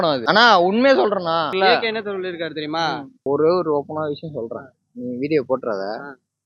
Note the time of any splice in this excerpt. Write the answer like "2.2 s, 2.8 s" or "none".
3.2 s